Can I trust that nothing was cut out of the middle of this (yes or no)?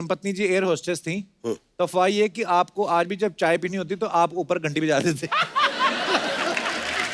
yes